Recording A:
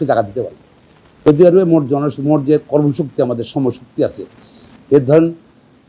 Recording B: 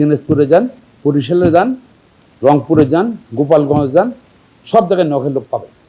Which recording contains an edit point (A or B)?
A